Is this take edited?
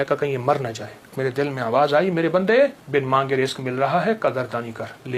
yes; 2 cuts; at 1.1 s, 2.8 s

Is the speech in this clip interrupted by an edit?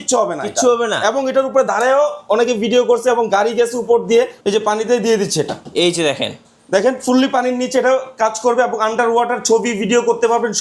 yes; 1 cut; at 4.3 s

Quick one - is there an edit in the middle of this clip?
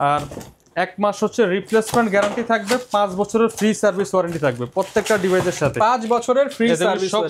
no; 0 cuts

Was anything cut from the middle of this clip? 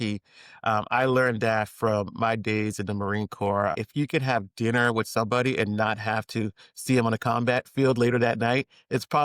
yes; 1 cut; at 3.7 s

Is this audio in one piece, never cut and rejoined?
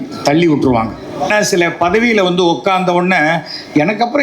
no; 1 cut; at 1.3 s

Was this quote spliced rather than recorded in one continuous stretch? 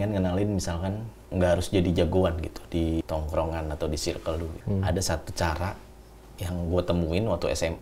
yes; 3 cuts; at 1.1 s, 3.0 s, 4.6 s

